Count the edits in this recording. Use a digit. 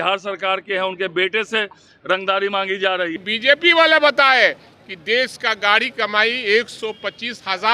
1